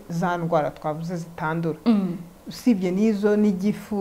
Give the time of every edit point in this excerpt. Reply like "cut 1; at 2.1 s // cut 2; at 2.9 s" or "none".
none

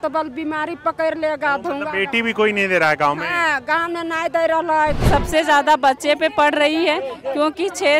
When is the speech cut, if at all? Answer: cut 1; at 5.0 s

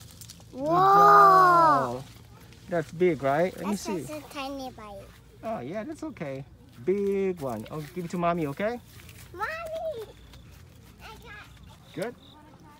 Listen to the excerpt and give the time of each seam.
cut 1; at 11.8 s

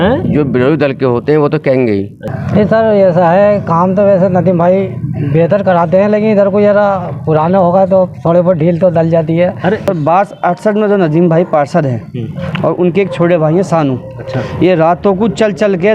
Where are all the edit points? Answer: cut 1; at 2.3 s // cut 2; at 9.9 s

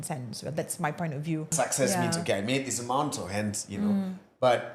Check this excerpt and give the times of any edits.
cut 1; at 1.5 s

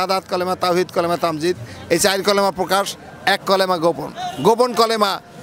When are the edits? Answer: none

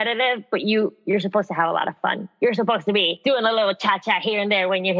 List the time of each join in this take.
cut 1; at 1.0 s // cut 2; at 3.1 s

